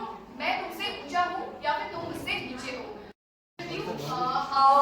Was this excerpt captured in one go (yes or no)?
no